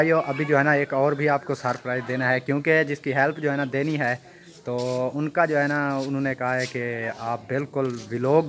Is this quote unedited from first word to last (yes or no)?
yes